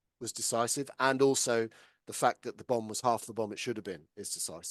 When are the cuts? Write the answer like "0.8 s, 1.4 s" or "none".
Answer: none